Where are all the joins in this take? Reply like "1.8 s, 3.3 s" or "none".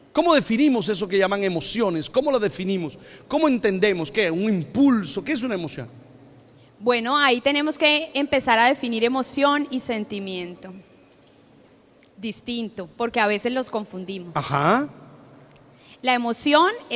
none